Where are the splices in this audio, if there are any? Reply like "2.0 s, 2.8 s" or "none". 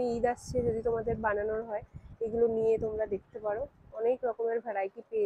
none